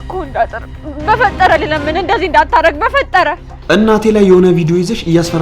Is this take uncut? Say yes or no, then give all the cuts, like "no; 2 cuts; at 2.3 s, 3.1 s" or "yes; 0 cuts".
no; 1 cut; at 3.5 s